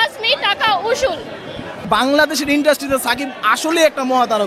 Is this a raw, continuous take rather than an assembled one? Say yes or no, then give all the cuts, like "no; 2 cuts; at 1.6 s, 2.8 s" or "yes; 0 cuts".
no; 1 cut; at 1.8 s